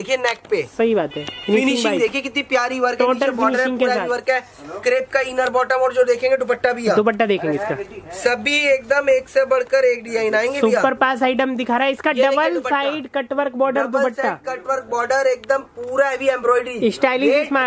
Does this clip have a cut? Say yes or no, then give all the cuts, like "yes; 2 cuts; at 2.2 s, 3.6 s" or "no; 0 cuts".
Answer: no; 0 cuts